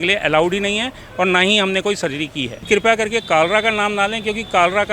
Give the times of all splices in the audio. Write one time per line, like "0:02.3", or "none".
0:02.6